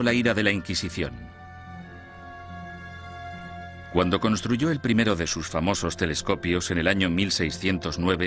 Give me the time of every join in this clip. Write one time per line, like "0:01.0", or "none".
none